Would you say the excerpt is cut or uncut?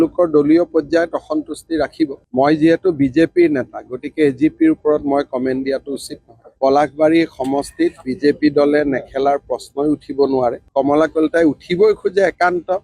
cut